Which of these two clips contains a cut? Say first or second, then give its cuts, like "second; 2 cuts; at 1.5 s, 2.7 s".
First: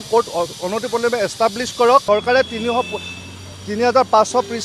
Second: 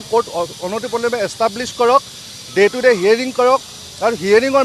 first; 1 cut; at 2.0 s